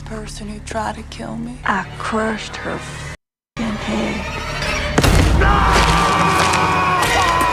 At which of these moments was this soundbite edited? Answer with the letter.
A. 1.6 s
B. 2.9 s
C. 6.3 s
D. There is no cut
A